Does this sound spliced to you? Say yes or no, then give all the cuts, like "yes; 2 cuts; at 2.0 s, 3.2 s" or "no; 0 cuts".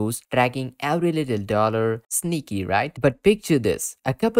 no; 0 cuts